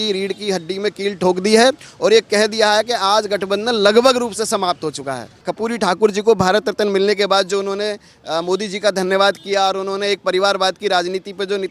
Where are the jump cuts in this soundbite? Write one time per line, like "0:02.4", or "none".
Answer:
0:05.4